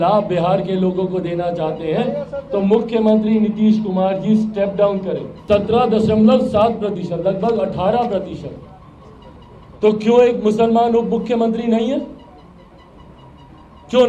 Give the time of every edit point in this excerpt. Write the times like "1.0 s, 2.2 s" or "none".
5.3 s